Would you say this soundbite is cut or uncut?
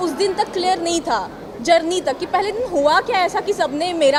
uncut